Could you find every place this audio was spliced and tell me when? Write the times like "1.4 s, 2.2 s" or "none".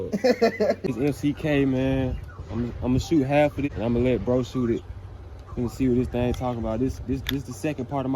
3.6 s